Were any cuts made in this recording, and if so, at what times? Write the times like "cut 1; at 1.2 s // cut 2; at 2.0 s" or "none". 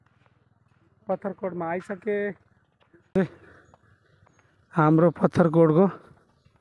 cut 1; at 3.2 s